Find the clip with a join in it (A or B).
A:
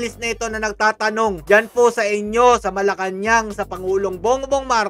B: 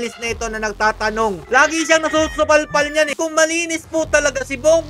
B